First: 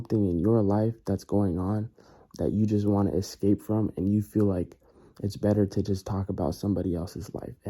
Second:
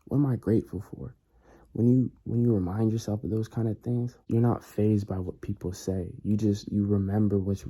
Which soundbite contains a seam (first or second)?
second